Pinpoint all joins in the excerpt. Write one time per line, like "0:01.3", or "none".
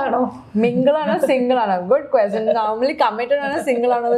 none

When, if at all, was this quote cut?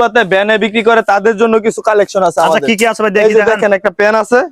none

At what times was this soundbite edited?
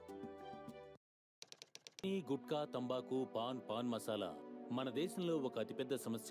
0:02.0

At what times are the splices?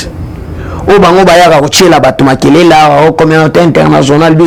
none

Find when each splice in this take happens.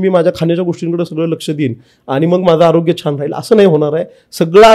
none

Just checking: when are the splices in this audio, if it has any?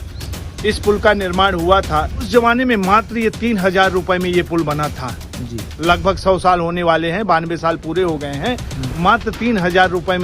0:02.3

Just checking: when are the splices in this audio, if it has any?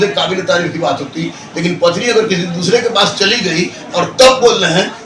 none

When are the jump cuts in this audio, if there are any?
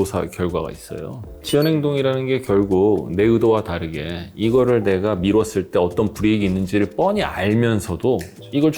none

